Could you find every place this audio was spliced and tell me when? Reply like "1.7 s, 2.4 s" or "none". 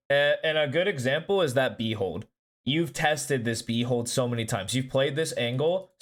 none